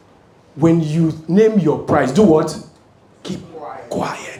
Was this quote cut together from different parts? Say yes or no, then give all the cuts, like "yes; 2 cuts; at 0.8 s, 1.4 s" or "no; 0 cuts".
no; 0 cuts